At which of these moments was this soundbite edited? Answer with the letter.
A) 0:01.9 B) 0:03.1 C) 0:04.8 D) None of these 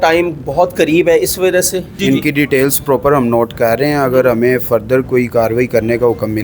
A